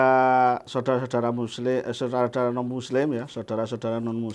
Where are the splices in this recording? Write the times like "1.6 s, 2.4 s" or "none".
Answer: none